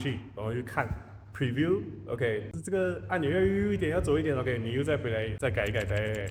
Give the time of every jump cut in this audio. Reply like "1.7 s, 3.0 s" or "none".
5.3 s